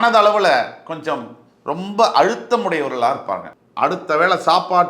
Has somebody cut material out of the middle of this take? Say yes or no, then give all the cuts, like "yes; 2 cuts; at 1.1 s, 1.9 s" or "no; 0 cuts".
yes; 1 cut; at 3.5 s